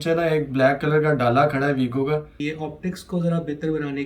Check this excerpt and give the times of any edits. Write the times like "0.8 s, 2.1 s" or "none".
2.4 s